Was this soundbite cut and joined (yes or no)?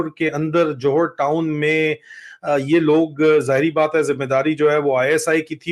no